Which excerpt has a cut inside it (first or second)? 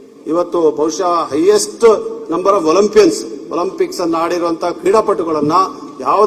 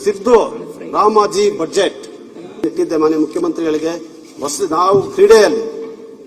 second